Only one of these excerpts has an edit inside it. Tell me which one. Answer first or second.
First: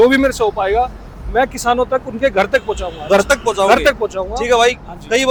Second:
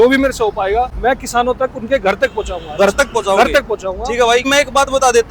second